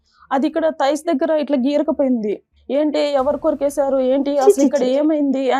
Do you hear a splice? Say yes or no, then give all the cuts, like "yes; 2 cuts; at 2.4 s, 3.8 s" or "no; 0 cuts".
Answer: yes; 1 cut; at 2.5 s